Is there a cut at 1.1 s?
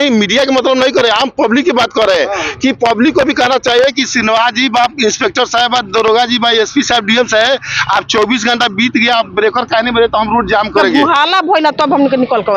no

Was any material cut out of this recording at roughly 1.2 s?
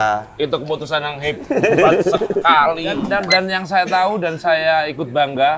no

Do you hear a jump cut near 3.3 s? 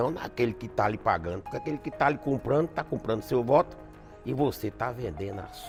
no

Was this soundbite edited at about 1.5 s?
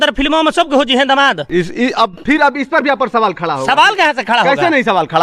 no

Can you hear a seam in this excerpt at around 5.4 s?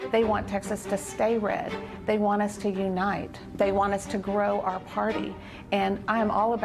no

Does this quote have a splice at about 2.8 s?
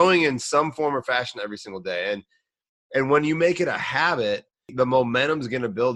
no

